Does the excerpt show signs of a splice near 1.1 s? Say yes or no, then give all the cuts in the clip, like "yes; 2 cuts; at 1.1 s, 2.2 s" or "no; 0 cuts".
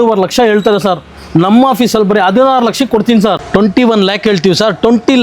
no; 1 cut; at 3.4 s